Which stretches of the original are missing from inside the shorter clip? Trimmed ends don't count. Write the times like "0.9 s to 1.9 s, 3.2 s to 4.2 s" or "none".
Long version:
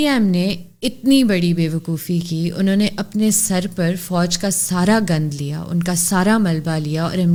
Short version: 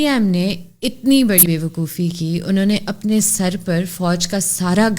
1.4 s to 1.5 s